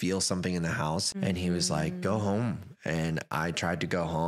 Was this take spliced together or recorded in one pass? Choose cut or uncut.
cut